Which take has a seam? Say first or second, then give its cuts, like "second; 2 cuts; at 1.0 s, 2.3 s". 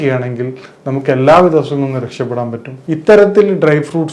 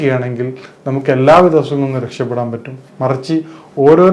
first; 1 cut; at 2.7 s